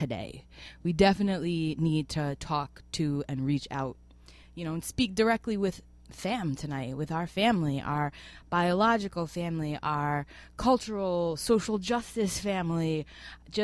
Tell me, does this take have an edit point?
no; 0 cuts

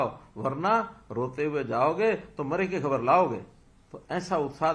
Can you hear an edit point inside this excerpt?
no; 0 cuts

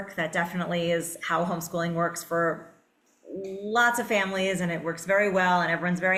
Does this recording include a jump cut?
no; 0 cuts

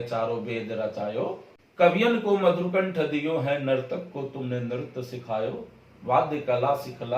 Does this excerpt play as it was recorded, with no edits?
no; 1 cut; at 1.6 s

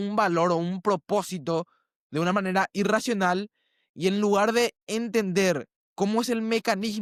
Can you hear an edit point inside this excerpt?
no; 0 cuts

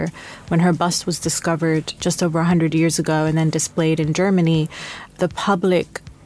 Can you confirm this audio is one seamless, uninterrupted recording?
no; 2 cuts; at 2.0 s, 5.1 s

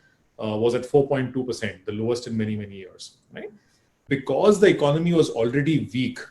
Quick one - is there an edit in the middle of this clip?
yes; 1 cut; at 4.0 s

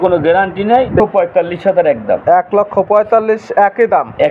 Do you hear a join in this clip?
yes; 1 cut; at 1.0 s

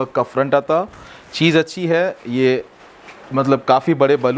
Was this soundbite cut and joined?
no; 0 cuts

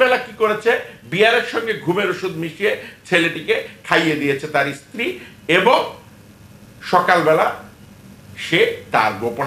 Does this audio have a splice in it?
no; 0 cuts

